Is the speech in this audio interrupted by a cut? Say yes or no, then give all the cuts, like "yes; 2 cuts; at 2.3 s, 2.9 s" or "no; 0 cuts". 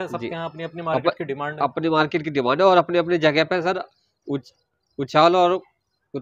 no; 0 cuts